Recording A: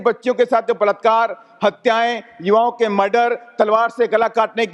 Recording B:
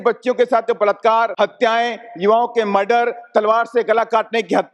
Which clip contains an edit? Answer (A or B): B